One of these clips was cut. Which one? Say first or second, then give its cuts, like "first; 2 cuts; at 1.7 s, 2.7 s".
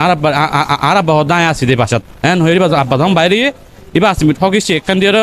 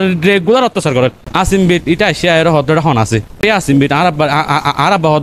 second; 1 cut; at 1.2 s